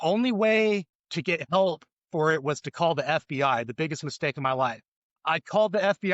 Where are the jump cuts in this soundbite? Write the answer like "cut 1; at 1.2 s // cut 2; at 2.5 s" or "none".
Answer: cut 1; at 5.1 s